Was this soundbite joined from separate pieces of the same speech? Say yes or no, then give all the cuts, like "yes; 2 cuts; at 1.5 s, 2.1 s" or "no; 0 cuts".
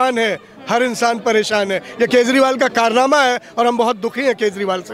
no; 0 cuts